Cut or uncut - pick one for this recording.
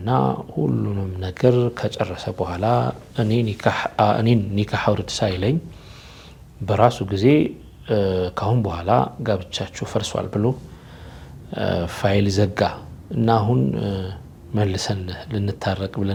uncut